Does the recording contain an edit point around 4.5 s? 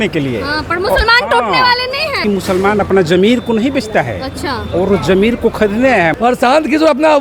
no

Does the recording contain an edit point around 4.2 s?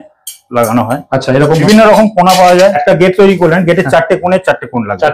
no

